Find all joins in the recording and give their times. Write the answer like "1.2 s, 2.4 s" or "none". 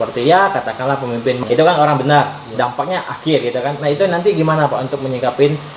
1.4 s